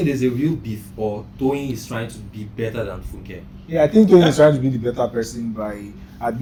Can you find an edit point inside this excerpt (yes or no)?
no